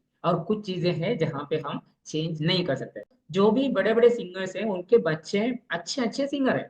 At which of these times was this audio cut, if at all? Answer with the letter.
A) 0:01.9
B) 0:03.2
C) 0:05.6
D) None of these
B